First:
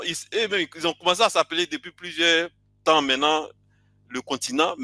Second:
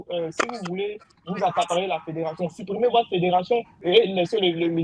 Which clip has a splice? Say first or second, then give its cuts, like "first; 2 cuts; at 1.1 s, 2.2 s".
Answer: second; 1 cut; at 3.8 s